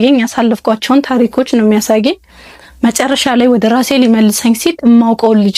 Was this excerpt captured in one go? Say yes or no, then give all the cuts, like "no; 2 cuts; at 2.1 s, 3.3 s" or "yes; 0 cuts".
yes; 0 cuts